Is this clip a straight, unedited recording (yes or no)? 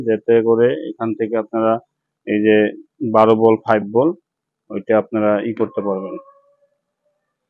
yes